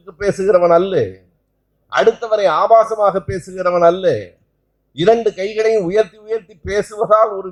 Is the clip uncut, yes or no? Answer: yes